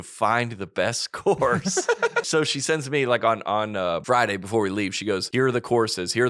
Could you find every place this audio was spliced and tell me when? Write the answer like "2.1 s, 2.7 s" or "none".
2.3 s, 4.0 s, 5.2 s